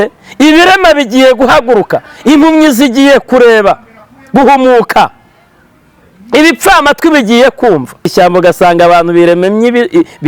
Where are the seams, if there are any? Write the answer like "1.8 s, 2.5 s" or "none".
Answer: 8.1 s